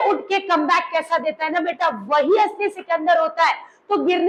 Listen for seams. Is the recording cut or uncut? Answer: uncut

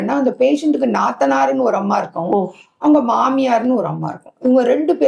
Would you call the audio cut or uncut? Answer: uncut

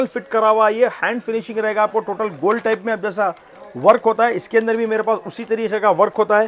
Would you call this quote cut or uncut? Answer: uncut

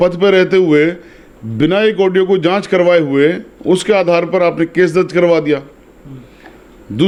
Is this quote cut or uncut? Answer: uncut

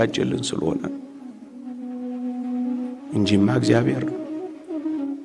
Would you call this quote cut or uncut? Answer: uncut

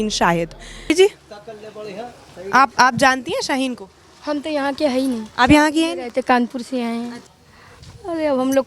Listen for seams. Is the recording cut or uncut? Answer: cut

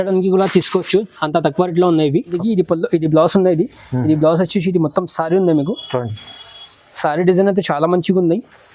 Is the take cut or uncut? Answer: cut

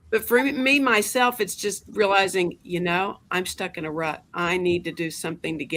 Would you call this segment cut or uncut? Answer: uncut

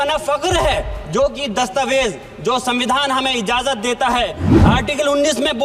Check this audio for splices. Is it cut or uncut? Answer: cut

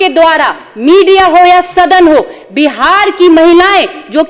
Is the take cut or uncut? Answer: uncut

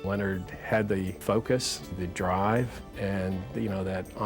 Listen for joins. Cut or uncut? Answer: cut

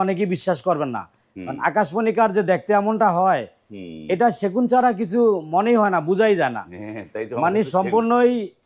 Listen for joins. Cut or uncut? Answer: uncut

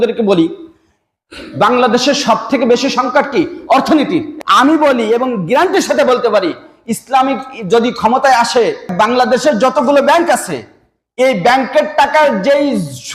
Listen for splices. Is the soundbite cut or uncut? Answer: cut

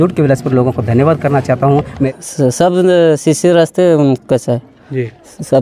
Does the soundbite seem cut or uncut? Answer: cut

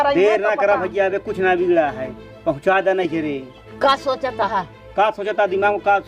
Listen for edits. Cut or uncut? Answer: uncut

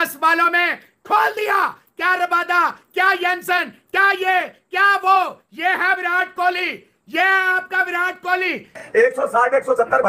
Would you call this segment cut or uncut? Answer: cut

